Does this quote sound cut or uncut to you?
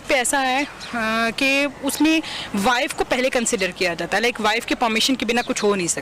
uncut